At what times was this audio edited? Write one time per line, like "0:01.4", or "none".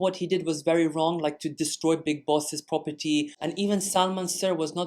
0:03.3